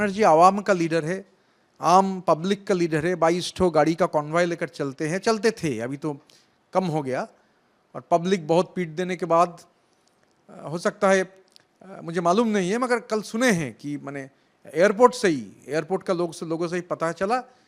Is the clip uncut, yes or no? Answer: yes